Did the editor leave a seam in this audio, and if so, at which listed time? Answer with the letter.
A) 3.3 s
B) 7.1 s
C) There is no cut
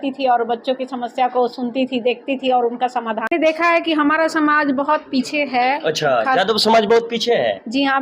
A